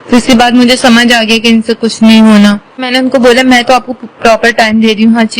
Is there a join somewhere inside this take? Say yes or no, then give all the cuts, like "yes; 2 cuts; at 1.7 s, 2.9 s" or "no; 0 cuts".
yes; 1 cut; at 2.8 s